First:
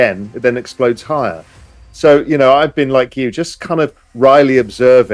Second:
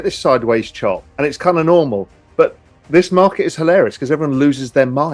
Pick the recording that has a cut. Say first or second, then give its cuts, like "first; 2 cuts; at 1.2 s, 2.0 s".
second; 1 cut; at 1.1 s